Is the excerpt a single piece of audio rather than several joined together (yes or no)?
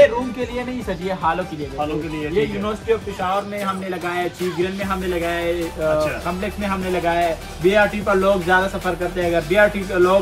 yes